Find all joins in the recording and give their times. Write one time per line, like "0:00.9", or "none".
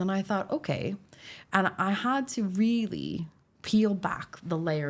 none